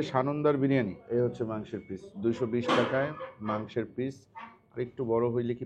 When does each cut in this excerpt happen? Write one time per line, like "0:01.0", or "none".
0:01.0